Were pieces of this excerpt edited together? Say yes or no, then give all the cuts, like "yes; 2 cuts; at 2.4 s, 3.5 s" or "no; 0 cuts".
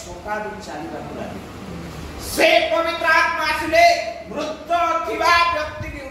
no; 0 cuts